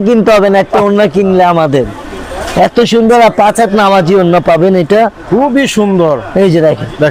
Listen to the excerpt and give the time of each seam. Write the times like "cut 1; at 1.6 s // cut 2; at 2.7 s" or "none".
none